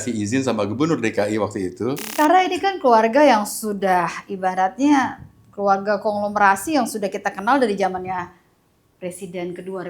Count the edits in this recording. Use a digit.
1